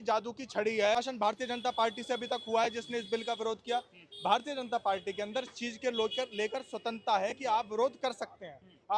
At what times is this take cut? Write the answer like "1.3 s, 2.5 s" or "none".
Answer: 1.0 s